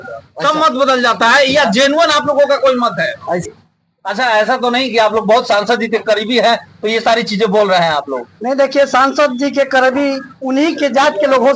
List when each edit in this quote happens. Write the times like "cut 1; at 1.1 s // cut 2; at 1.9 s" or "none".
cut 1; at 3.6 s

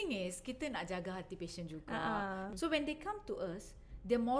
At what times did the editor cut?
cut 1; at 2.5 s

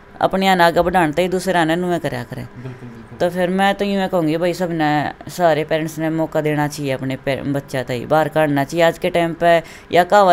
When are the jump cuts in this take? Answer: none

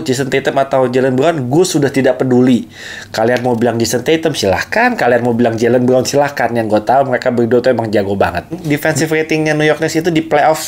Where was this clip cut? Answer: cut 1; at 8.6 s

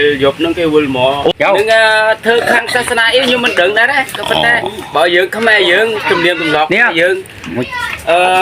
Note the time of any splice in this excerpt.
cut 1; at 1.3 s

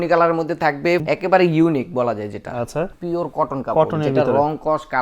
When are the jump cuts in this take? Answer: cut 1; at 1.0 s // cut 2; at 2.9 s

